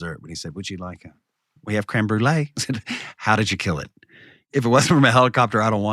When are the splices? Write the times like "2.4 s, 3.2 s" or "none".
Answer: 4.4 s